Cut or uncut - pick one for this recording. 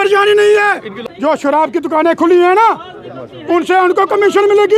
cut